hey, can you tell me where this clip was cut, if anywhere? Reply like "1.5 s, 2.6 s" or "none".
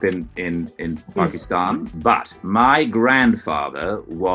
1.9 s